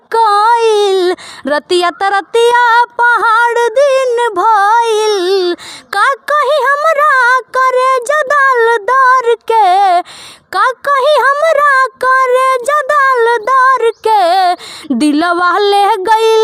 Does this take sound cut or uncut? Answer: uncut